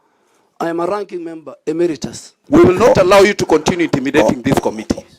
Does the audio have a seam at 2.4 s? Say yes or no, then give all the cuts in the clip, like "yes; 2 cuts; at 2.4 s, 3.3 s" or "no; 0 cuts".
yes; 1 cut; at 2.4 s